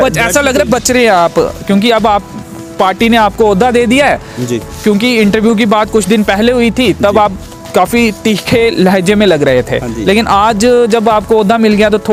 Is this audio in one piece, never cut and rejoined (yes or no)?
yes